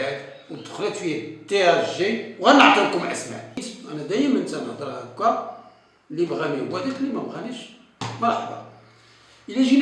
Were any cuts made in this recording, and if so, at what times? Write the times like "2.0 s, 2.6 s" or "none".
3.8 s